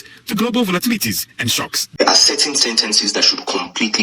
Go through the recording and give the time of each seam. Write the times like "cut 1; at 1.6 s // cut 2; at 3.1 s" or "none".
cut 1; at 1.8 s